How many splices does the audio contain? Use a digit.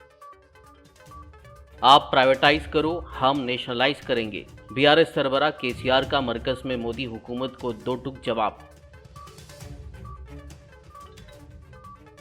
1